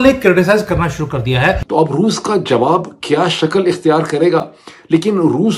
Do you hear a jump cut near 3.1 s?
no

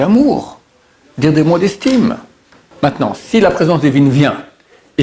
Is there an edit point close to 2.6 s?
yes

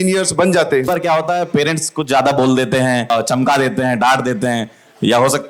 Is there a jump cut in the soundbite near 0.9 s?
yes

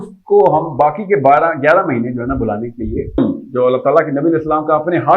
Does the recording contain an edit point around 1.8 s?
no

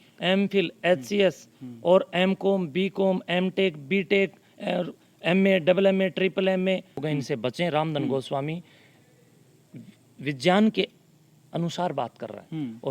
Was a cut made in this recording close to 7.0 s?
yes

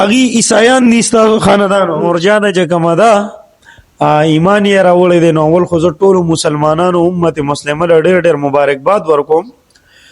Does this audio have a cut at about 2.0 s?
yes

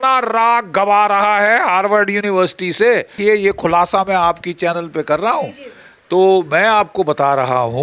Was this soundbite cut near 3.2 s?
yes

